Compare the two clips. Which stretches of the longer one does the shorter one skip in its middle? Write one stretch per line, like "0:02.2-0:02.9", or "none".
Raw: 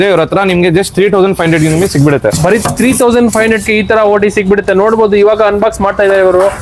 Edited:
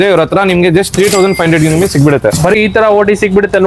0:02.6-0:03.7